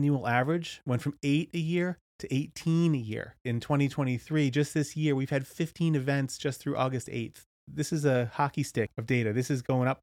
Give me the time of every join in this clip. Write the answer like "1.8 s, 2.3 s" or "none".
3.4 s, 7.7 s, 8.9 s